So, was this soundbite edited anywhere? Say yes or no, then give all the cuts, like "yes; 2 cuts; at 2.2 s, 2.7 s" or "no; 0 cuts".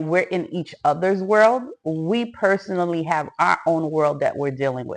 no; 0 cuts